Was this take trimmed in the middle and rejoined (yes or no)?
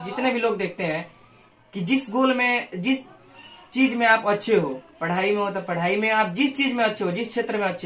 no